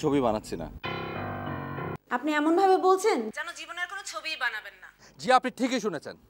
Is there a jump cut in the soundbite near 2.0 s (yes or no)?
yes